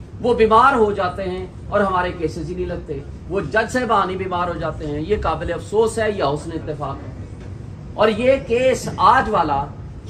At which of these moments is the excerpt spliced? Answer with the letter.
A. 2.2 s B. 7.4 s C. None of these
C